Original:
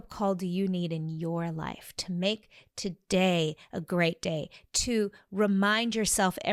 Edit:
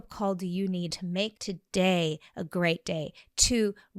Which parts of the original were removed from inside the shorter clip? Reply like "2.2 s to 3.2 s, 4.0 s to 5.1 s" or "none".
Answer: 1.0 s to 2.4 s